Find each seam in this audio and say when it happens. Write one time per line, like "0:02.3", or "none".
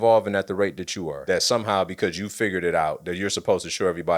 0:01.2